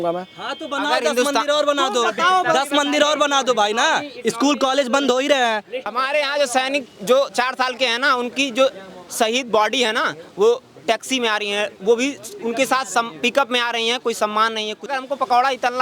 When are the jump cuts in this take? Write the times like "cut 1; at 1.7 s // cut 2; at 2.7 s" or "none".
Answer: cut 1; at 6.0 s // cut 2; at 14.9 s

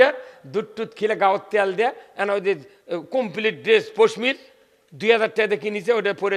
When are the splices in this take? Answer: none

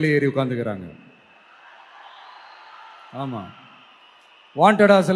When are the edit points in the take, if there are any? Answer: none

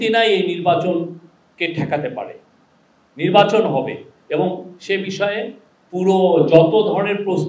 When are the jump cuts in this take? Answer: none

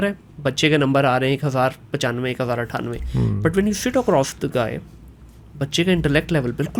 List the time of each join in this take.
none

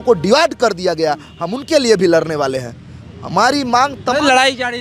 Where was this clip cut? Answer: none

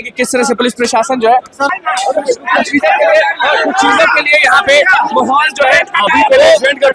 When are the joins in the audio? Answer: cut 1; at 1.7 s

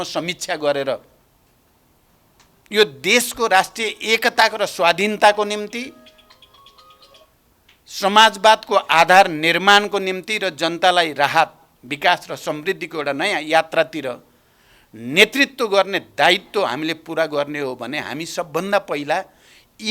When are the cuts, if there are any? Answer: none

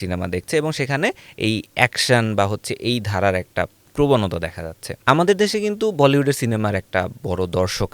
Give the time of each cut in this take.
cut 1; at 3.8 s // cut 2; at 5.0 s

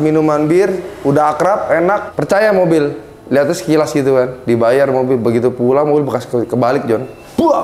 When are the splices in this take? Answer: cut 1; at 2.1 s

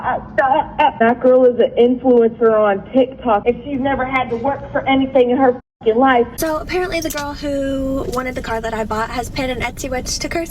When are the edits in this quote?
cut 1; at 1.0 s // cut 2; at 3.4 s // cut 3; at 6.3 s

